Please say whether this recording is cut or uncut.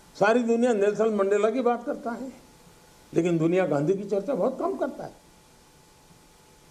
uncut